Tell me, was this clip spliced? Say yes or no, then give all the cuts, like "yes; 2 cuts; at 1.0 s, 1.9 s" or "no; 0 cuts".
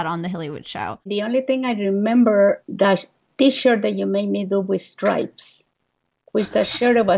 yes; 2 cuts; at 1.0 s, 2.6 s